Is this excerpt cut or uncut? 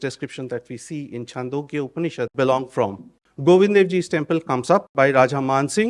cut